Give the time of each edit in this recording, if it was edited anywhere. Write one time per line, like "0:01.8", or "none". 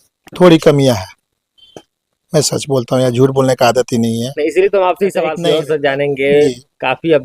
0:05.4